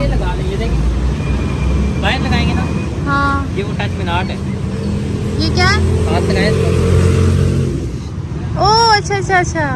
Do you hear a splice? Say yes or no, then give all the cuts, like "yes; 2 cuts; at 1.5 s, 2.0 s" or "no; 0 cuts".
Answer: yes; 1 cut; at 8.0 s